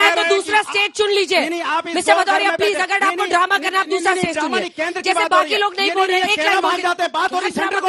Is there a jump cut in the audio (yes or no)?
no